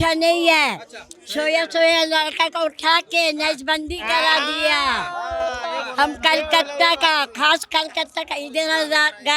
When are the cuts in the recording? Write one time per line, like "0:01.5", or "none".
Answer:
none